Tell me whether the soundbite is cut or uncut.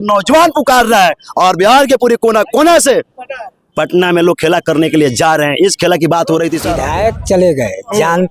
cut